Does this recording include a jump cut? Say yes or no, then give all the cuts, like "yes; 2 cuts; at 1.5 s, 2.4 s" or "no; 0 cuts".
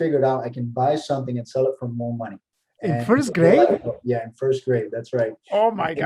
no; 0 cuts